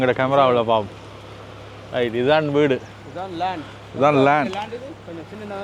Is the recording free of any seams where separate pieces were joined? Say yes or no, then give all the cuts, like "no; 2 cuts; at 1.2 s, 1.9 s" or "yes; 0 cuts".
yes; 0 cuts